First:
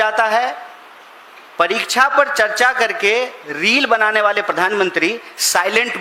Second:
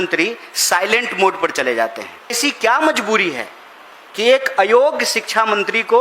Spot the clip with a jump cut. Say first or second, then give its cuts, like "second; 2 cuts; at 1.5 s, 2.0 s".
second; 1 cut; at 2.4 s